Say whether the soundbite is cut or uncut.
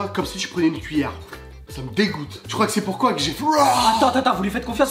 uncut